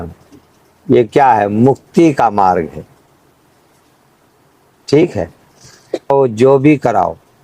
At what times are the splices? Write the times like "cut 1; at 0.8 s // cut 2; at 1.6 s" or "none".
cut 1; at 6.1 s